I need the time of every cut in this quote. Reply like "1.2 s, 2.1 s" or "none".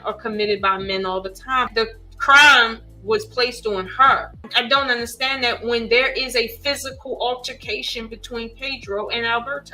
1.7 s, 4.5 s